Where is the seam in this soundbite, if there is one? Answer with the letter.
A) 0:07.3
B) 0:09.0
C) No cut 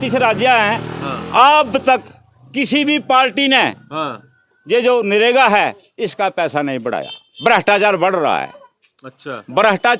C